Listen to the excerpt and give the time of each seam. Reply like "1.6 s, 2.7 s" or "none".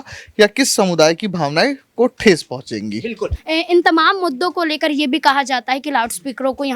3.4 s